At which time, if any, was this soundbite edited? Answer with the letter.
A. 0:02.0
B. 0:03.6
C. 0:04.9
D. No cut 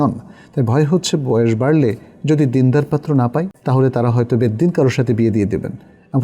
B